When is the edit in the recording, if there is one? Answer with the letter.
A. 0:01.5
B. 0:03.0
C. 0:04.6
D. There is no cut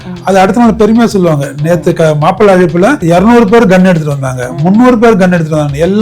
B